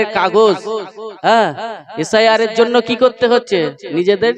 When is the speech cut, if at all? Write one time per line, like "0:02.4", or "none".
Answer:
none